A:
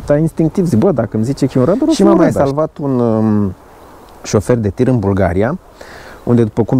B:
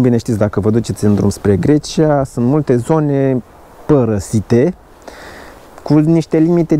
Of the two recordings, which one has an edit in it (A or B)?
A